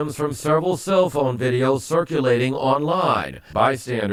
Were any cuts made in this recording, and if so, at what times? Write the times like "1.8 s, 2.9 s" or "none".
none